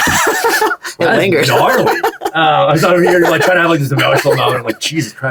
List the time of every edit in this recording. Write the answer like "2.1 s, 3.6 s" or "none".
none